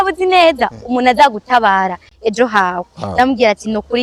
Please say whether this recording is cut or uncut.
uncut